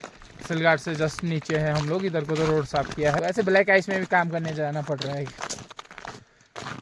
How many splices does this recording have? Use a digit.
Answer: 1